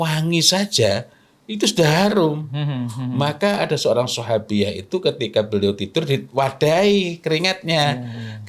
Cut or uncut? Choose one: uncut